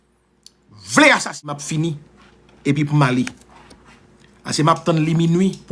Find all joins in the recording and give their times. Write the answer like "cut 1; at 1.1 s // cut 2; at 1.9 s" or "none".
cut 1; at 1.3 s